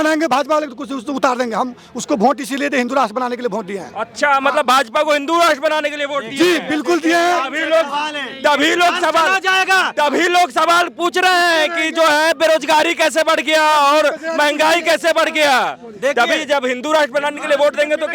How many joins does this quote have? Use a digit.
0